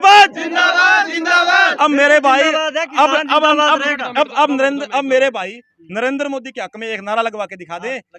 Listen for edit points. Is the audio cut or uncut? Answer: uncut